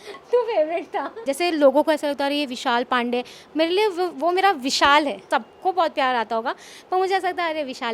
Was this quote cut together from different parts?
yes; 2 cuts; at 1.2 s, 5.2 s

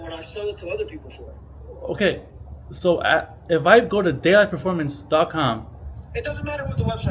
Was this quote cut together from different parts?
no; 0 cuts

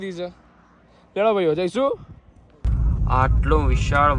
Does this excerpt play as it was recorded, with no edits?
no; 1 cut; at 2.6 s

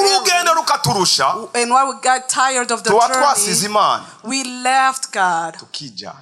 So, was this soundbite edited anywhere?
no; 0 cuts

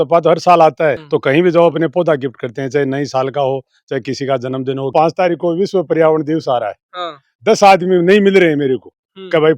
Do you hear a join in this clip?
yes; 2 cuts; at 1.0 s, 4.9 s

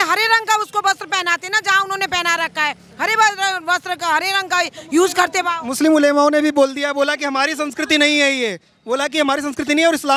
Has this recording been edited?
no; 0 cuts

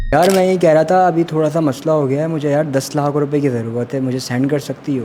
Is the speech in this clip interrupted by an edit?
no; 0 cuts

